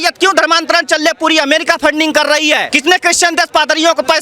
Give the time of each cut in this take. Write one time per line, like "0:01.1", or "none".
0:02.7